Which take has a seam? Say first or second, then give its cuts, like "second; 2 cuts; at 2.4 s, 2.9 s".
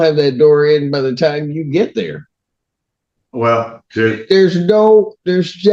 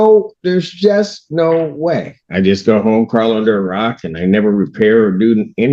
second; 1 cut; at 2.2 s